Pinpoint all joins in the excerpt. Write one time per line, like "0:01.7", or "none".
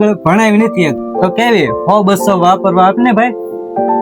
0:01.1